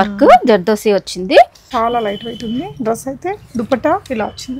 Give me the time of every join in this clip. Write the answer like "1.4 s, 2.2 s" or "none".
1.6 s

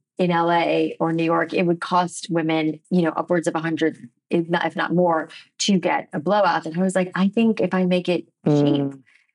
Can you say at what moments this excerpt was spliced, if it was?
none

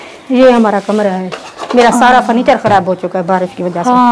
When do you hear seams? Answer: none

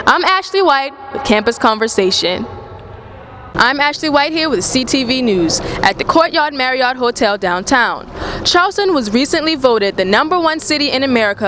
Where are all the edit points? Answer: 3.5 s

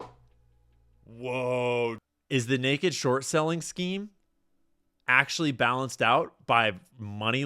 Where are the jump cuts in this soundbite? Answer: 2.0 s

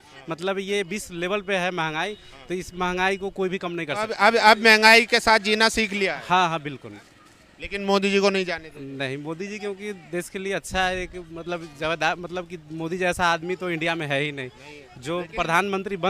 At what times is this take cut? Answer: 4.1 s

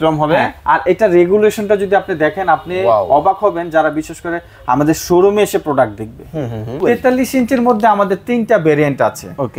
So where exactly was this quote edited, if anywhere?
6.8 s

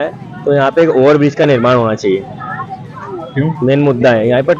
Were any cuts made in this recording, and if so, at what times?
none

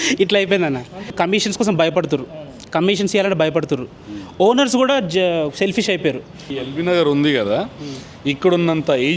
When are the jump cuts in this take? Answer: 1.1 s, 6.3 s

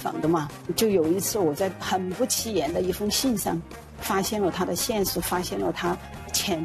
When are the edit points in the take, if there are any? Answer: none

